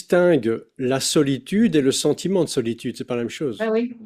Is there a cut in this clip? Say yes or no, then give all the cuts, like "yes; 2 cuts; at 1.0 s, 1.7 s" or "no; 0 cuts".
no; 0 cuts